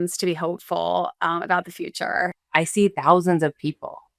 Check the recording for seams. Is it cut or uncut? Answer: cut